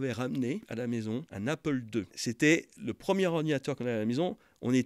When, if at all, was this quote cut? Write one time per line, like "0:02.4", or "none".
0:00.9
0:02.2